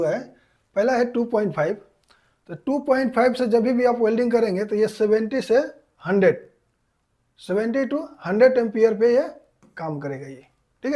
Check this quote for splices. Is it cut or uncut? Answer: uncut